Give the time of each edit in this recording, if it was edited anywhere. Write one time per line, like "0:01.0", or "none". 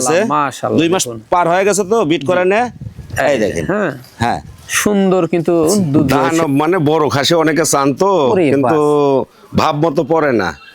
0:06.2